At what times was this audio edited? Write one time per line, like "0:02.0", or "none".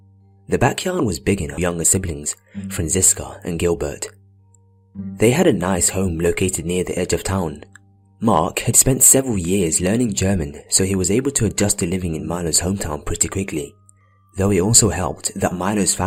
none